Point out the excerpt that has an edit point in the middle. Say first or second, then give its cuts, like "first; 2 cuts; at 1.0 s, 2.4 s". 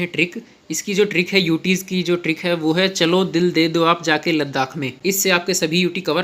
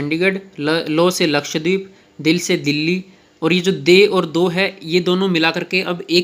first; 1 cut; at 4.9 s